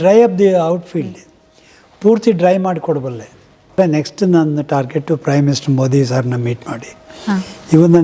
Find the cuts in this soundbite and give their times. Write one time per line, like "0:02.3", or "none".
0:03.7